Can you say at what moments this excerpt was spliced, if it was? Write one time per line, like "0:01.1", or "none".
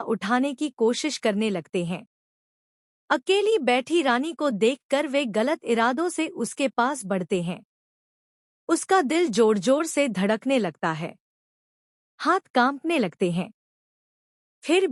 none